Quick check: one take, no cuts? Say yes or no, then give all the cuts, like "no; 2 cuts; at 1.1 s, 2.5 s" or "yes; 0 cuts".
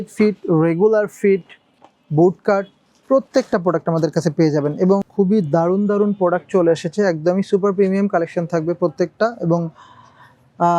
no; 1 cut; at 5.1 s